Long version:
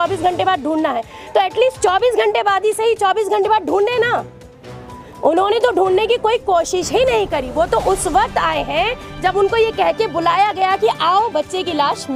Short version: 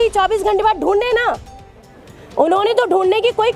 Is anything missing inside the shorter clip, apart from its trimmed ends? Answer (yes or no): no